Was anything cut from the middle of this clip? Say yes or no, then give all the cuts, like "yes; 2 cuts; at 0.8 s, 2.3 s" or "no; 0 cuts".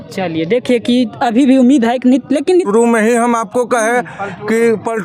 yes; 1 cut; at 2.7 s